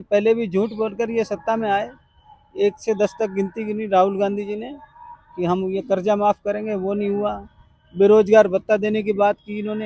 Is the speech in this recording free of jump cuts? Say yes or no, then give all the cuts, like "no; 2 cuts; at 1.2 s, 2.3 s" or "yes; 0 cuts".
yes; 0 cuts